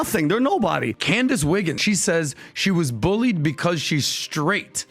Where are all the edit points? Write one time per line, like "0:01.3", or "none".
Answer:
0:00.9
0:01.8